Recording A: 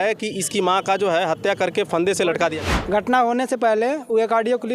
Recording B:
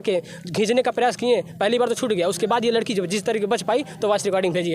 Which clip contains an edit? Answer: A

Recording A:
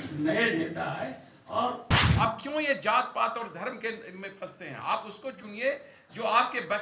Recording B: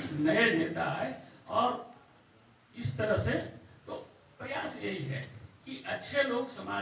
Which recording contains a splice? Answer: A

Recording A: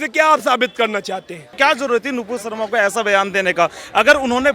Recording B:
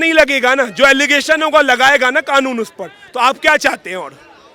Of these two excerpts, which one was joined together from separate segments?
A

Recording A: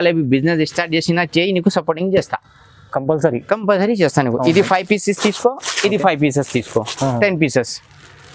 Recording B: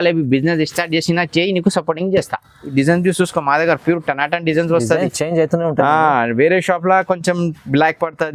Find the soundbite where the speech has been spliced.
B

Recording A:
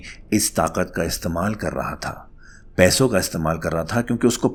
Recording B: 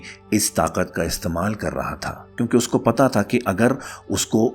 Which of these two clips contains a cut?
B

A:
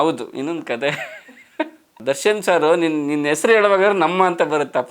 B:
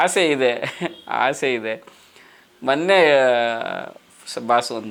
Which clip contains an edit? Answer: A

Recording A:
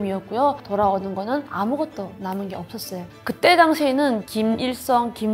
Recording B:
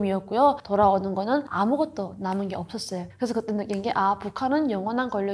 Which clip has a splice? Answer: A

